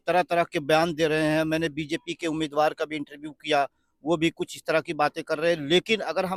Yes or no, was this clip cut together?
no